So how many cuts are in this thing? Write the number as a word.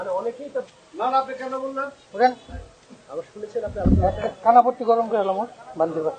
one